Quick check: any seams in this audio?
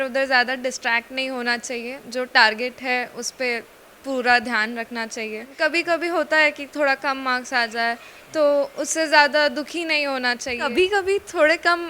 yes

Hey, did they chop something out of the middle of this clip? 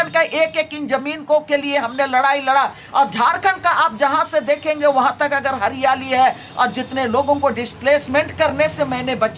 no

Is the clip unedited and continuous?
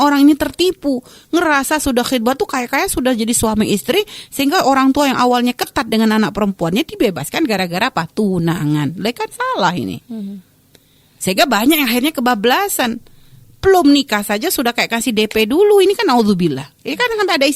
yes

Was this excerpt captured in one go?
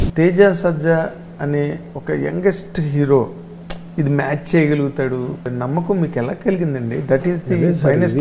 no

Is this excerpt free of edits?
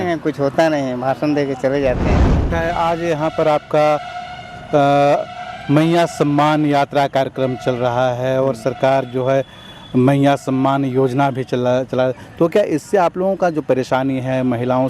no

